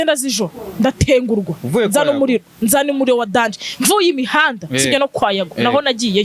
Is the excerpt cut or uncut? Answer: uncut